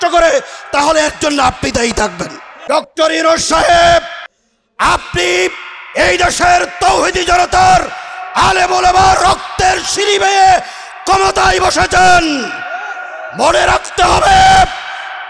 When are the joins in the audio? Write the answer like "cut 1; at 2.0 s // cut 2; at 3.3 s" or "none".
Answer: cut 1; at 2.5 s